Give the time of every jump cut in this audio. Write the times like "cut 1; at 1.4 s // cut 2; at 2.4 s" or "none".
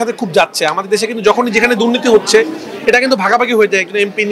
none

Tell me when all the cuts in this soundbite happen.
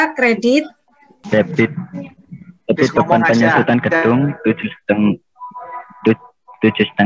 cut 1; at 1.1 s

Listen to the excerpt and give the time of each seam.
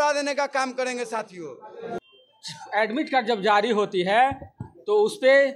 cut 1; at 2.0 s

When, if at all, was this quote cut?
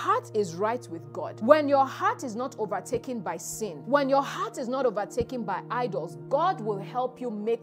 cut 1; at 1.2 s // cut 2; at 3.8 s

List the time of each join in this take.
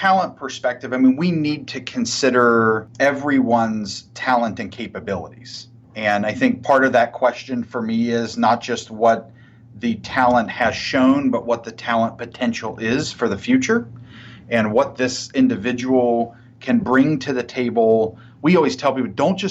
cut 1; at 2.9 s

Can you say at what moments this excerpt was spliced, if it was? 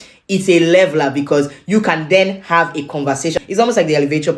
cut 1; at 3.4 s

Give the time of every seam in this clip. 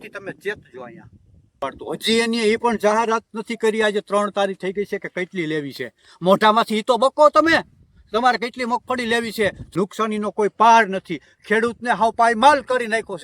cut 1; at 1.5 s // cut 2; at 9.6 s

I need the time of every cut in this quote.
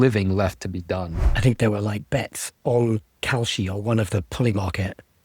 cut 1; at 1.2 s // cut 2; at 3.1 s

